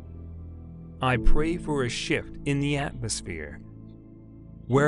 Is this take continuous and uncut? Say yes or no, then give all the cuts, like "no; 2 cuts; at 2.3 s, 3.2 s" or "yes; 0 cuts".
no; 1 cut; at 1.0 s